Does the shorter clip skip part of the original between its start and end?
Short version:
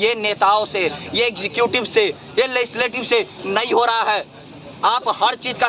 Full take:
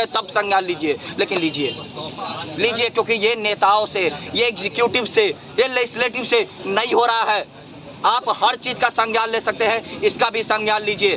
no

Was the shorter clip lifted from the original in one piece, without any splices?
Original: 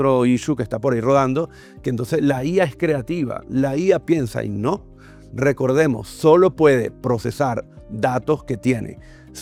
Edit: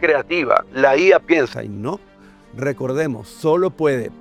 yes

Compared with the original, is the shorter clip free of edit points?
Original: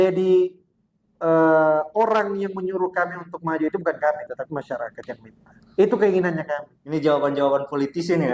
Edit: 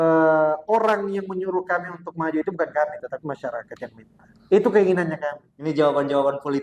yes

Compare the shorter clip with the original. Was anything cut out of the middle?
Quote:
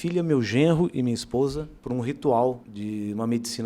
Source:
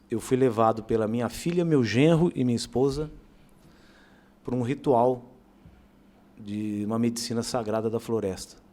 yes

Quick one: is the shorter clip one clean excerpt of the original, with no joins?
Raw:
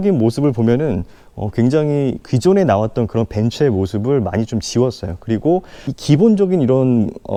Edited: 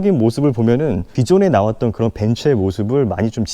no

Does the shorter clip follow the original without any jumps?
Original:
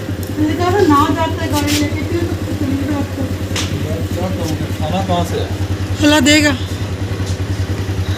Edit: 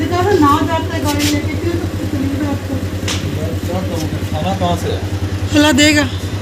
yes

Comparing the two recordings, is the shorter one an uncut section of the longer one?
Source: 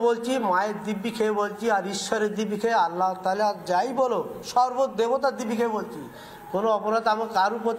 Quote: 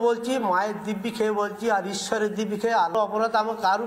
no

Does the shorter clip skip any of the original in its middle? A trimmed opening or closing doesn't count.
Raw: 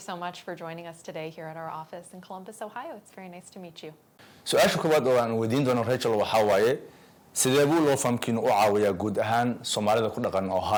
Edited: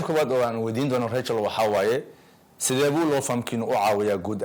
no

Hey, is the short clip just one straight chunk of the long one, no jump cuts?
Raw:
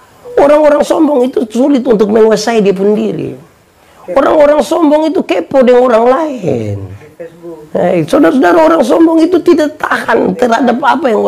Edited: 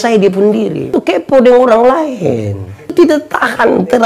no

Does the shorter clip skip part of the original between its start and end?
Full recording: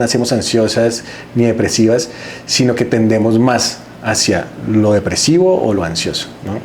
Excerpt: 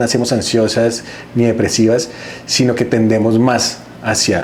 no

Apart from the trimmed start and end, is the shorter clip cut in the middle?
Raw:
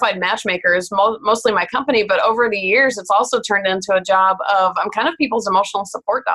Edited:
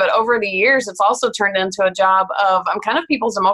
no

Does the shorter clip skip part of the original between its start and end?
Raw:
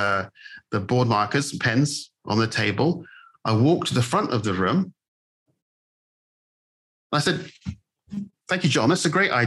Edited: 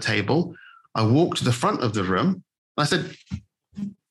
yes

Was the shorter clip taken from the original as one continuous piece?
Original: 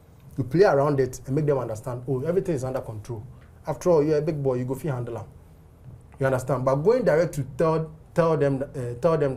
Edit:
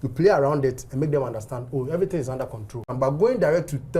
no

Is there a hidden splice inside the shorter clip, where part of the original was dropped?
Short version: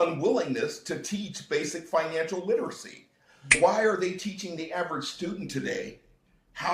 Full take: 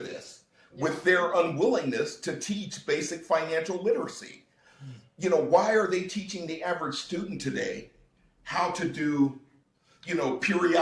yes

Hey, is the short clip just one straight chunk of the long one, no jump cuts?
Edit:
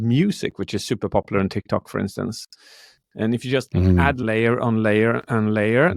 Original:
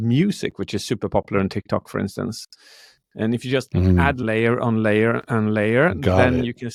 yes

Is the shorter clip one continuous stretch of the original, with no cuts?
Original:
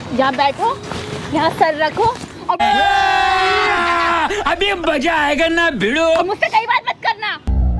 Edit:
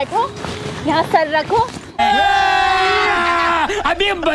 no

